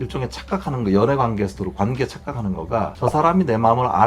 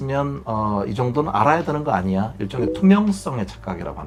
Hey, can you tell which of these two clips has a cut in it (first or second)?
first